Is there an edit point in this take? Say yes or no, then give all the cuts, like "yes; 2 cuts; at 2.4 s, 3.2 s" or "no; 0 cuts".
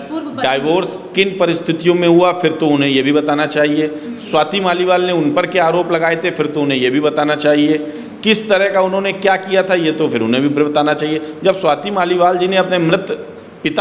no; 0 cuts